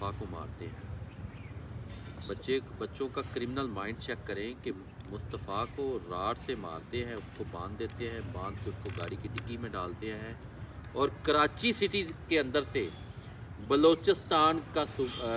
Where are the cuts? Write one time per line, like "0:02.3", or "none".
none